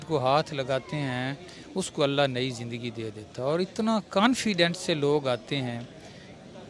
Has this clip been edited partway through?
no; 0 cuts

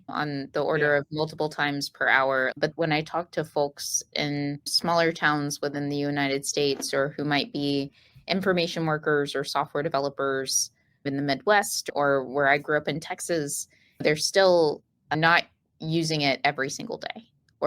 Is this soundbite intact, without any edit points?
no; 2 cuts; at 2.5 s, 4.7 s

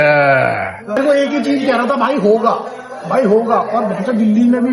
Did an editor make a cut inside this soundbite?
yes; 1 cut; at 1.0 s

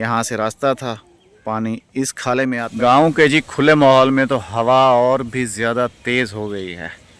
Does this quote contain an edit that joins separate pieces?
yes; 1 cut; at 2.7 s

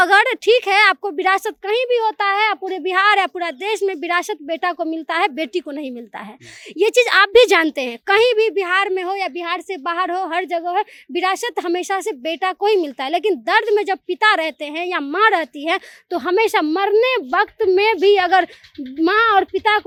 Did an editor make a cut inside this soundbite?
no; 0 cuts

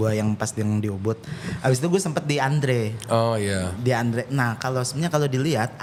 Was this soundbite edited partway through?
no; 0 cuts

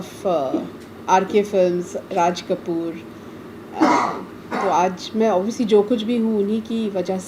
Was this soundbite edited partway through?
no; 0 cuts

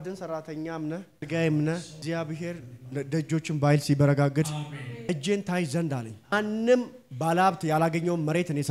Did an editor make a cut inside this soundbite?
yes; 4 cuts; at 1.3 s, 2.0 s, 5.1 s, 6.3 s

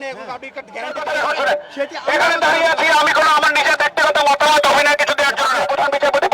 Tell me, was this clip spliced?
yes; 2 cuts; at 1.0 s, 5.5 s

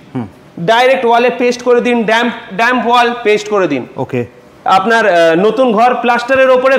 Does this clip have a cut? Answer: no; 0 cuts

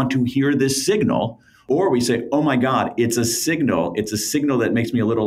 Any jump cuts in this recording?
yes; 1 cut; at 1.6 s

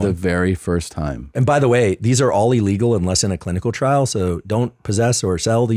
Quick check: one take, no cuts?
no; 1 cut; at 1.2 s

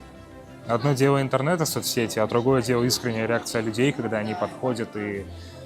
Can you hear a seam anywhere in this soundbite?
no; 0 cuts

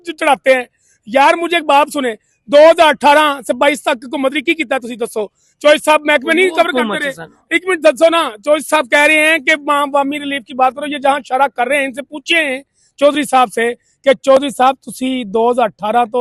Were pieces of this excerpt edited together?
no; 0 cuts

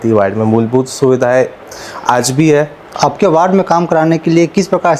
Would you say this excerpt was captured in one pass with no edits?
no; 1 cut; at 2.9 s

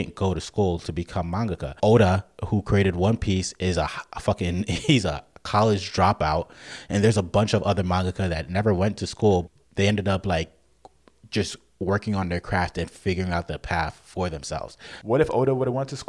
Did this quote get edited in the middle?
yes; 3 cuts; at 1.7 s, 9.5 s, 14.9 s

